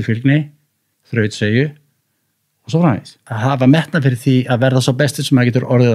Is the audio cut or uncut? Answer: cut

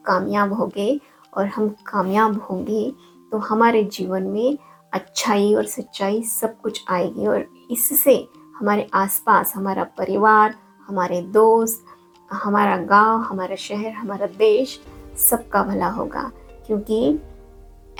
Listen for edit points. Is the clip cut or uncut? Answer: uncut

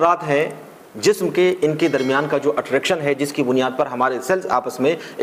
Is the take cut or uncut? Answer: uncut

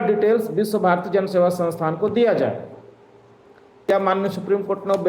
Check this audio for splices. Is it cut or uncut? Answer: cut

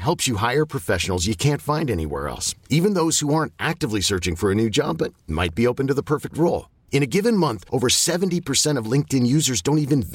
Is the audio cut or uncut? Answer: uncut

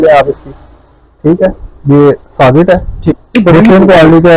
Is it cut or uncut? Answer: cut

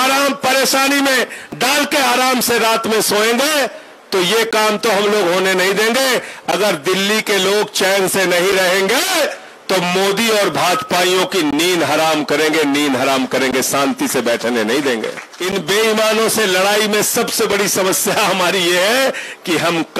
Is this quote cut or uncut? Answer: cut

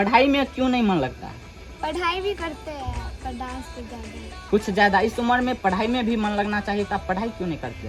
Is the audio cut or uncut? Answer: uncut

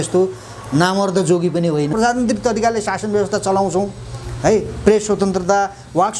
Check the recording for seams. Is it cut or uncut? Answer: cut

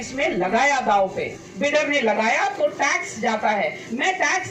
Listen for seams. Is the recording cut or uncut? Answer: cut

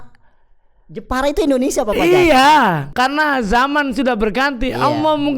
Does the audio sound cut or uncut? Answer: cut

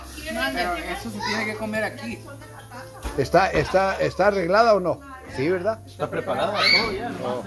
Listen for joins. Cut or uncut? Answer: uncut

